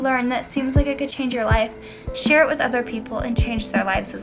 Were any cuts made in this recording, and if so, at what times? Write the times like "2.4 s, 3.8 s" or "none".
none